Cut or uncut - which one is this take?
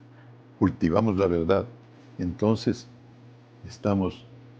uncut